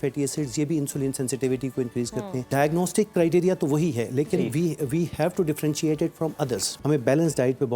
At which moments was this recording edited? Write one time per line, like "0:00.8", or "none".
0:02.5
0:06.7